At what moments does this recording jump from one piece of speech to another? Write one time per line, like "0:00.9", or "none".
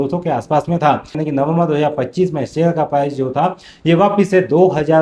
0:01.2